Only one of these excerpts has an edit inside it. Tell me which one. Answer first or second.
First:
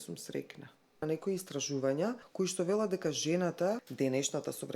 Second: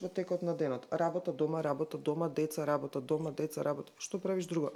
first